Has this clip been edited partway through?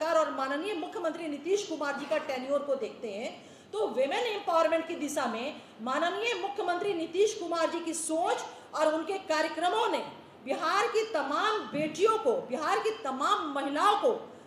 no; 0 cuts

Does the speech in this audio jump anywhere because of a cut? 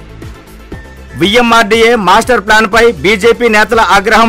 no; 0 cuts

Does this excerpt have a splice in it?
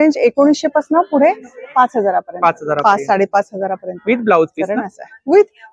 no; 0 cuts

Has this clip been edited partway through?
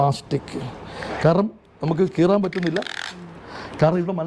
no; 0 cuts

